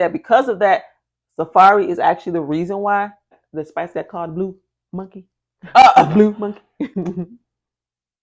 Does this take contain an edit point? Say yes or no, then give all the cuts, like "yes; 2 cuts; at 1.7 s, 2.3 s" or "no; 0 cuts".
yes; 1 cut; at 3.4 s